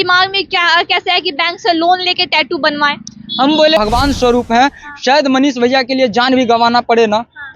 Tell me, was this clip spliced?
yes; 1 cut; at 3.8 s

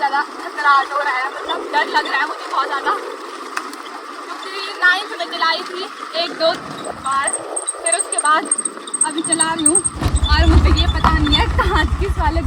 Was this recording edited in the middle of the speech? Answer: no; 0 cuts

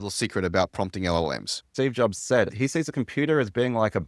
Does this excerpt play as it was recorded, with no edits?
no; 2 cuts; at 1.6 s, 2.5 s

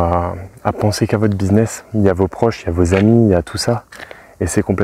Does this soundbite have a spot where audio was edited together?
no; 0 cuts

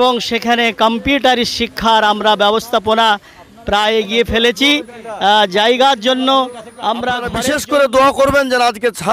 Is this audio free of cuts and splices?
no; 1 cut; at 7.3 s

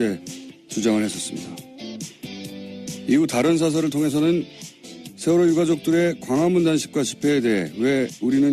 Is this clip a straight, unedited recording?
no; 1 cut; at 6.2 s

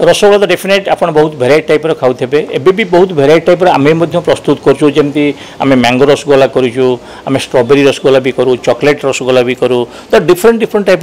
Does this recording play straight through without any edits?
yes; 0 cuts

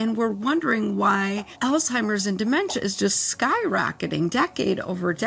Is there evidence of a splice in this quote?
yes; 1 cut; at 1.5 s

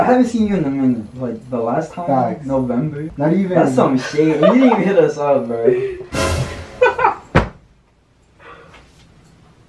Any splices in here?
yes; 1 cut; at 3.0 s

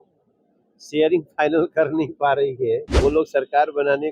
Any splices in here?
yes; 1 cut; at 2.9 s

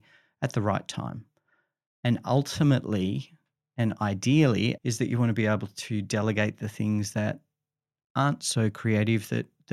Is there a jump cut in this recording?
yes; 1 cut; at 4.8 s

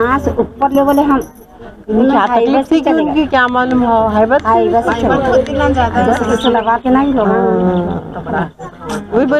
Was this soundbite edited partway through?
no; 0 cuts

